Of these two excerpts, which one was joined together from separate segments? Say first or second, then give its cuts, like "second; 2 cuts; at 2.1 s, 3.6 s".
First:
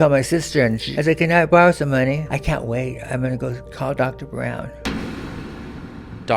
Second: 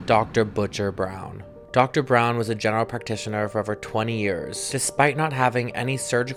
first; 4 cuts; at 0.9 s, 2.3 s, 3.6 s, 4.8 s